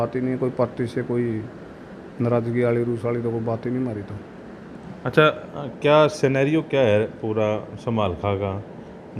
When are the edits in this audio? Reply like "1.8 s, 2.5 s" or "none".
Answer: none